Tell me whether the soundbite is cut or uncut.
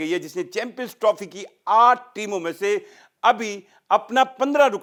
uncut